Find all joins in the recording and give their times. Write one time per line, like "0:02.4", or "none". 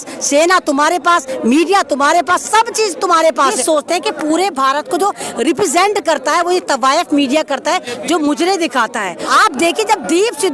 0:03.5
0:09.3

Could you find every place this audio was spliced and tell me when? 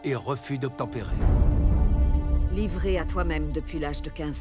0:01.1

